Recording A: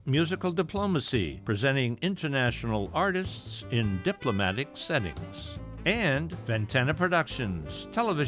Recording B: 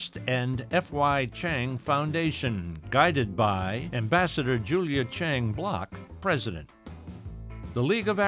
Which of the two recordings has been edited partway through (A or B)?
A